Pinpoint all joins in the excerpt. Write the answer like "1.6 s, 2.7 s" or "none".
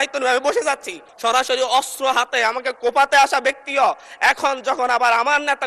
1.1 s